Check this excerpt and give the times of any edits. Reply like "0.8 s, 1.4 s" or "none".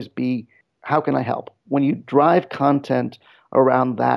1.6 s